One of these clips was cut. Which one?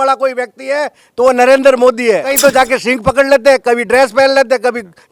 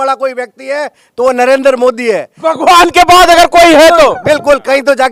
first; 1 cut; at 2.3 s

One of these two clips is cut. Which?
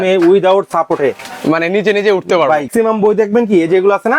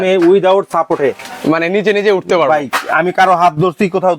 first; 1 cut; at 2.7 s

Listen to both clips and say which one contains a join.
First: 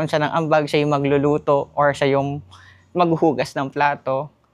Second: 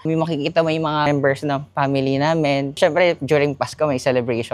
second; 2 cuts; at 1.0 s, 2.8 s

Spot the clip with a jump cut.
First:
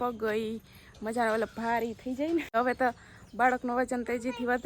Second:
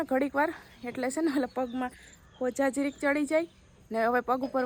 first; 1 cut; at 2.5 s

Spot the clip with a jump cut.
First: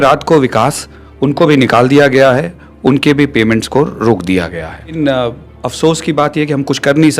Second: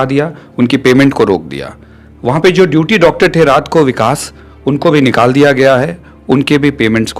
first; 1 cut; at 5.0 s

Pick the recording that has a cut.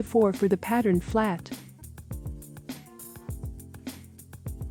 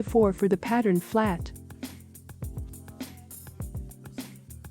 second; 1 cut; at 1.4 s

